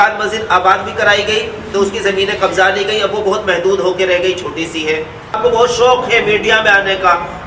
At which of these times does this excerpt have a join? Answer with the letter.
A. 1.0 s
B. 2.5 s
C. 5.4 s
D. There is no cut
C